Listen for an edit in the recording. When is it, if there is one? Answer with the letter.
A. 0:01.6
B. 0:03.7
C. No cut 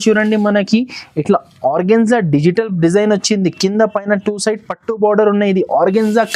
C